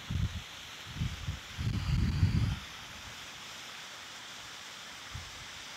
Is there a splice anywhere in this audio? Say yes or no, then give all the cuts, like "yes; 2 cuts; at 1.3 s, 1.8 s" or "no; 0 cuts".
no; 0 cuts